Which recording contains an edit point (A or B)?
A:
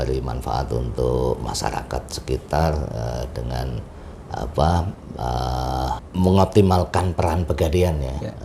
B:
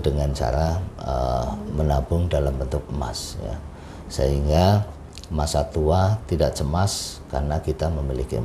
A